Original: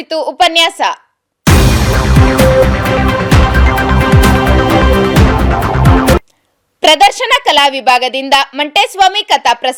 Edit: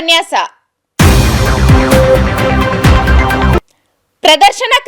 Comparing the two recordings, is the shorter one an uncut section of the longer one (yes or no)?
no